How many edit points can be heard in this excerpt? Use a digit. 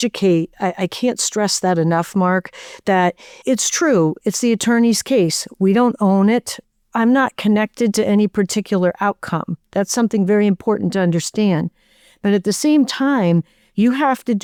0